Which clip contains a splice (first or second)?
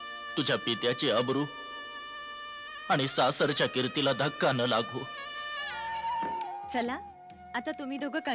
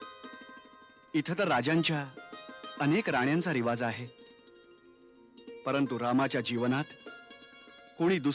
first